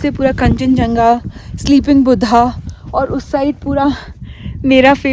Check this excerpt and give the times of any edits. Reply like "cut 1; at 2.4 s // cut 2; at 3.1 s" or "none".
none

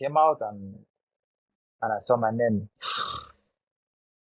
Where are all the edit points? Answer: none

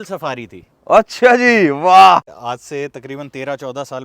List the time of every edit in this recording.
cut 1; at 2.4 s

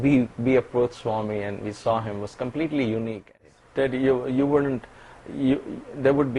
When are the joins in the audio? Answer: cut 1; at 3.5 s

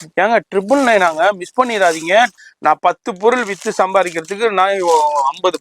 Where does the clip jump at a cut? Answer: cut 1; at 2.3 s

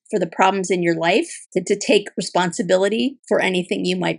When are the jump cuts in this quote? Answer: cut 1; at 1.4 s // cut 2; at 3.2 s

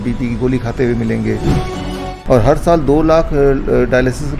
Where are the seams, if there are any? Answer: cut 1; at 1.9 s

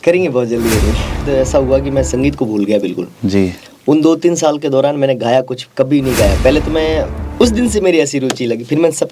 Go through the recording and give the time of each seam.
cut 1; at 1.2 s // cut 2; at 7.2 s

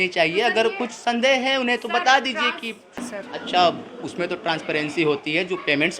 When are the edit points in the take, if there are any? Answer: cut 1; at 2.9 s

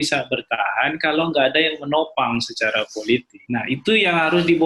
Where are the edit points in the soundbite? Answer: cut 1; at 3.3 s

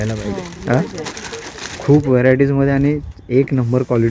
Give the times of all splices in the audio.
none

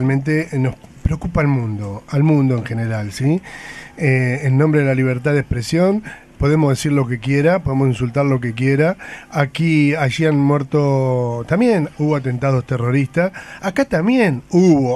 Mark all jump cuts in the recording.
none

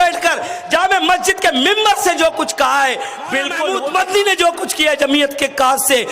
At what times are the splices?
cut 1; at 3.6 s

